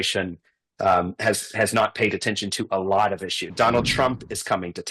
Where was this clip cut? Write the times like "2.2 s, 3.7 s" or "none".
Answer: 3.5 s